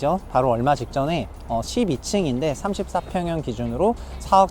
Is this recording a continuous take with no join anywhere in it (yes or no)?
yes